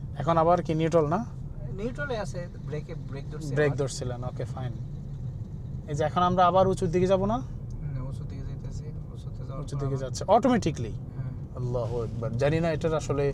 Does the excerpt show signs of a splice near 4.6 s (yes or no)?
no